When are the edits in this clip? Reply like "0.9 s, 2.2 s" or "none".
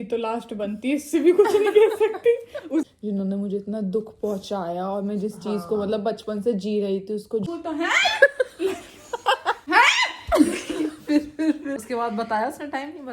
2.9 s, 7.5 s, 9.6 s, 11.7 s